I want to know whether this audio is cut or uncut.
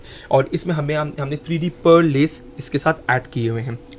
uncut